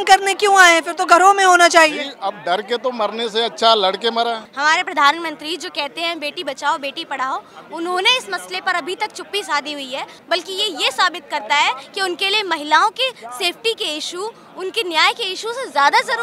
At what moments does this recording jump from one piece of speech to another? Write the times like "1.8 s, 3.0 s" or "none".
4.5 s, 10.1 s